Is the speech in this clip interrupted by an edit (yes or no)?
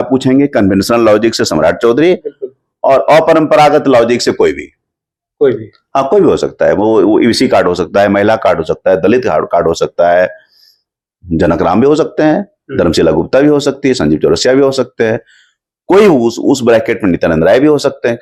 no